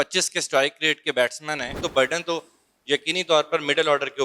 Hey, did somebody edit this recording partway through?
yes; 1 cut; at 1.8 s

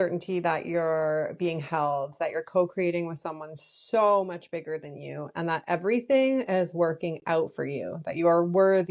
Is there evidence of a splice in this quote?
no; 0 cuts

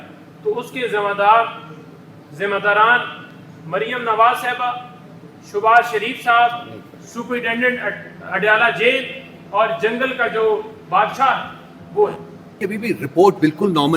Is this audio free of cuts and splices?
no; 1 cut; at 12.6 s

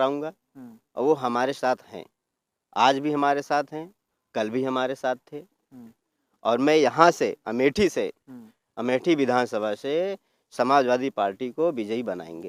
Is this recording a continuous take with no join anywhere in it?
yes; 0 cuts

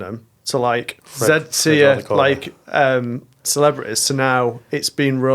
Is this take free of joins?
no; 1 cut; at 1.0 s

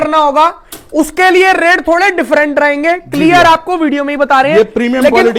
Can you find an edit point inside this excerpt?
no; 0 cuts

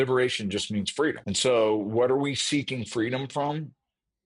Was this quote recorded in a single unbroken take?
no; 1 cut; at 1.3 s

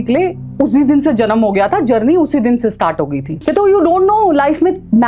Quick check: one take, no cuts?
no; 1 cut; at 3.4 s

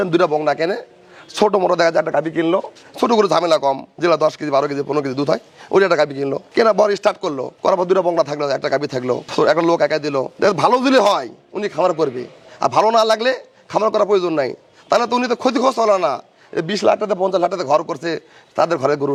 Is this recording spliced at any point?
no; 0 cuts

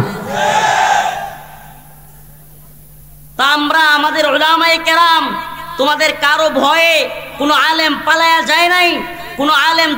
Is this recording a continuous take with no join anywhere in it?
yes; 0 cuts

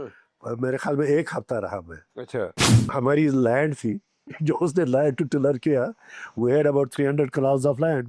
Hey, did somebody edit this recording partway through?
yes; 1 cut; at 2.8 s

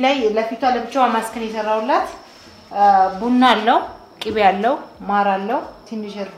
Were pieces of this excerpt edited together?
no; 0 cuts

